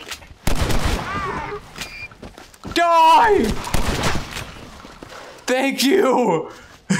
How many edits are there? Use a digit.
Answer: 0